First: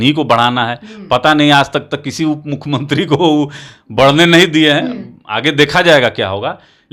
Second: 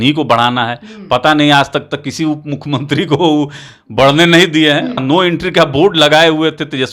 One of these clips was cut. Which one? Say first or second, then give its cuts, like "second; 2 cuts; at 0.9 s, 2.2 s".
second; 1 cut; at 5.0 s